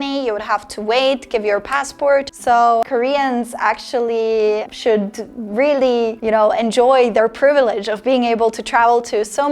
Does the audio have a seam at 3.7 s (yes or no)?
no